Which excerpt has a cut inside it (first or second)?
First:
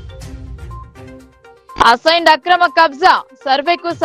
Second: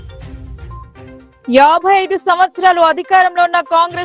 second